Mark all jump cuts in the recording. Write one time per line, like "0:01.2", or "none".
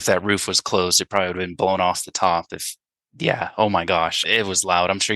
0:04.2